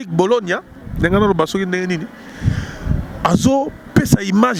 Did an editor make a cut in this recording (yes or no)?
no